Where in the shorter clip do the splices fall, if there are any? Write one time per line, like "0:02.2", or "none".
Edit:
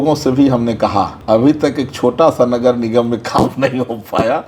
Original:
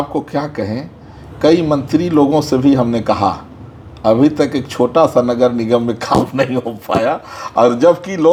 0:01.1

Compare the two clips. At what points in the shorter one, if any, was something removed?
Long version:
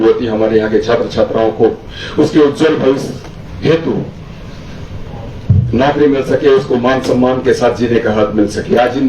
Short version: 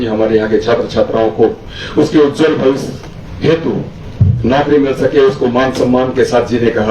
0:04.0

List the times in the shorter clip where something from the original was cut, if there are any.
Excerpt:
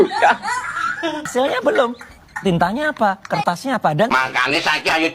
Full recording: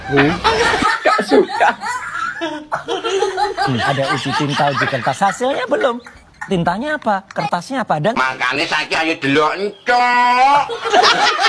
0:01.3

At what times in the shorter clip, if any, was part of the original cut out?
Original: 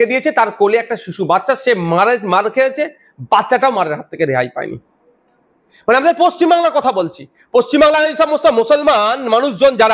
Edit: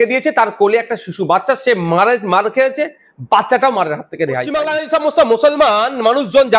0:04.6

